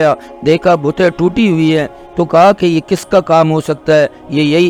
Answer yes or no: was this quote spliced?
no